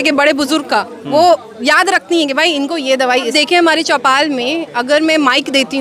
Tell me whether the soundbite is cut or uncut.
cut